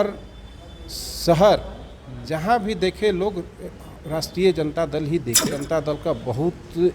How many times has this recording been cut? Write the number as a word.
one